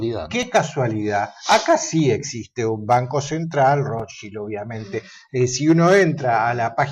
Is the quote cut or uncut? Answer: uncut